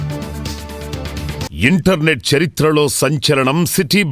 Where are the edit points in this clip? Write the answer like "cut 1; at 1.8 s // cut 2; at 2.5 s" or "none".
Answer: cut 1; at 1.5 s